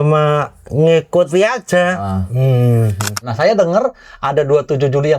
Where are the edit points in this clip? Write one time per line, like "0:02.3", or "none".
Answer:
0:03.2